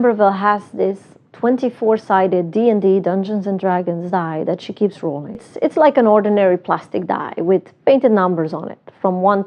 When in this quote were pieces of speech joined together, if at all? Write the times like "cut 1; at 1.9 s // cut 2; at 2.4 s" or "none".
cut 1; at 5.5 s